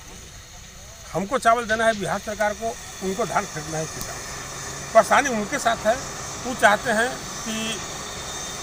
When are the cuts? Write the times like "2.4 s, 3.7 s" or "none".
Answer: none